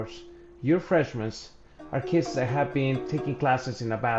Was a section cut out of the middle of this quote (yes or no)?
yes